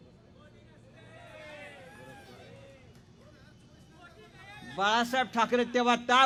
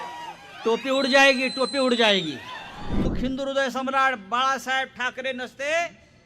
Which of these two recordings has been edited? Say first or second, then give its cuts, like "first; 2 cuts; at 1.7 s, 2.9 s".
second; 1 cut; at 3.1 s